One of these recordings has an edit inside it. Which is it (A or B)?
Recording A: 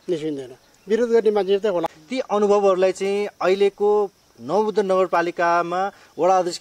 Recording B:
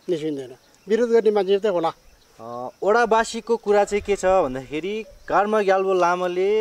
A